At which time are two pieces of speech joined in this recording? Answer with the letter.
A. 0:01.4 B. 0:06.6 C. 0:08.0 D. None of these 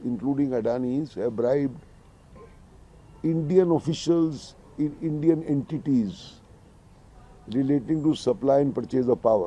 D